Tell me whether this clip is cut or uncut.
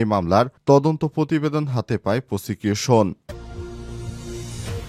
cut